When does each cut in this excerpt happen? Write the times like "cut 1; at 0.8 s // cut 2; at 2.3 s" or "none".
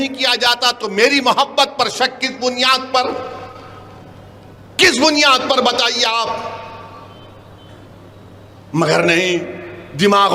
none